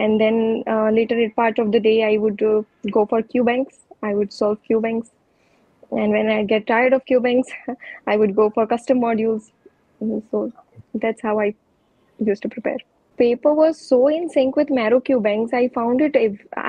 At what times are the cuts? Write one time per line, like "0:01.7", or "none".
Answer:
0:13.1